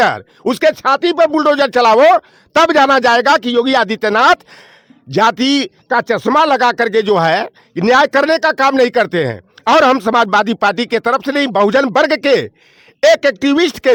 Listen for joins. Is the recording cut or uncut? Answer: uncut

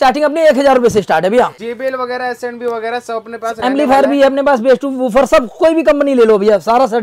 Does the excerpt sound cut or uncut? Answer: cut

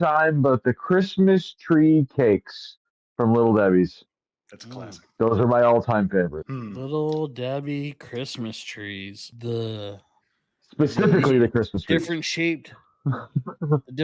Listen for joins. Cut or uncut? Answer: cut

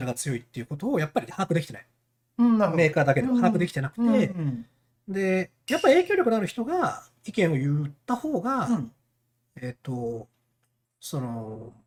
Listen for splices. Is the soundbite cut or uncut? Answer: uncut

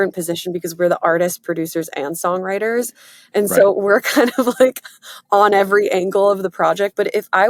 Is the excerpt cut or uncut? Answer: uncut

